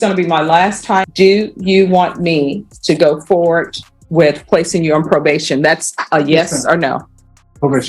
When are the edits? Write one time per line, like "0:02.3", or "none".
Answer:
0:01.1